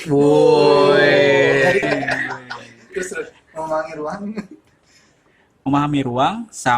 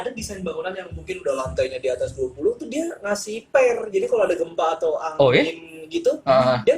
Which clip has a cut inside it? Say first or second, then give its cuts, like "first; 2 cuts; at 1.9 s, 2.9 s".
first; 1 cut; at 1.8 s